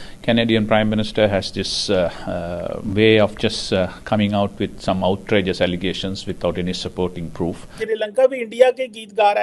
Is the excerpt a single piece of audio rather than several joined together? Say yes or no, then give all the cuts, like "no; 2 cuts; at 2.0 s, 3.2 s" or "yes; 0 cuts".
no; 2 cuts; at 2.8 s, 7.7 s